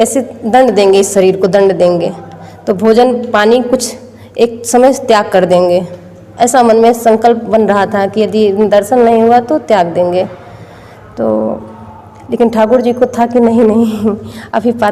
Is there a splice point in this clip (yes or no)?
no